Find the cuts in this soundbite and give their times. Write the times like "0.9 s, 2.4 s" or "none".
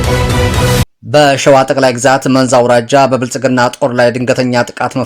0.9 s